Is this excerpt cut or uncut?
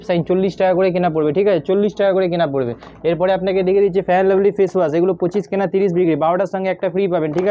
uncut